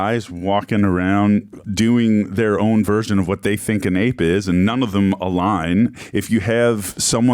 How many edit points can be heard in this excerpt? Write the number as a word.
one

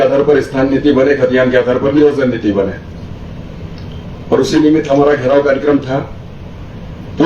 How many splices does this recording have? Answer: zero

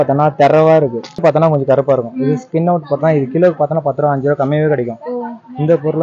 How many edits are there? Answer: one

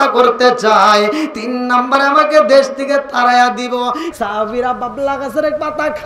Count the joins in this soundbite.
one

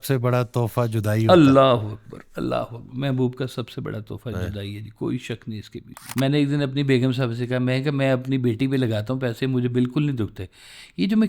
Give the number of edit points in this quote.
two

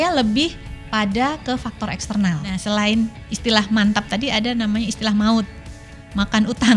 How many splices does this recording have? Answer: one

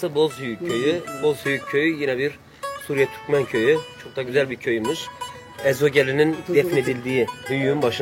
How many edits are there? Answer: two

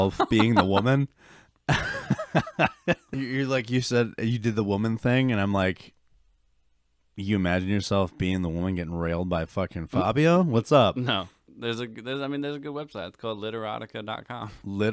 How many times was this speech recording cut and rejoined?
two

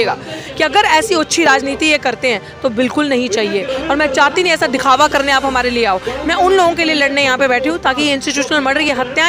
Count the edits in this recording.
zero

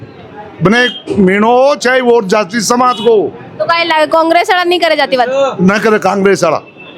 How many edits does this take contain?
zero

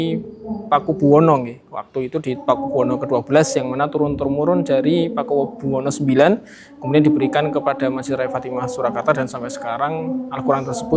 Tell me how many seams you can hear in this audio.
zero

